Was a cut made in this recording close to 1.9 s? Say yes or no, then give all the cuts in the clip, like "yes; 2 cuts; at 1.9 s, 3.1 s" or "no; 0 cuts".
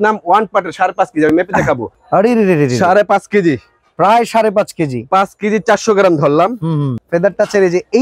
yes; 2 cuts; at 1.9 s, 7.0 s